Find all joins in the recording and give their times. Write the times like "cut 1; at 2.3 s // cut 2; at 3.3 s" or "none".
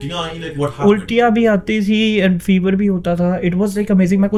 none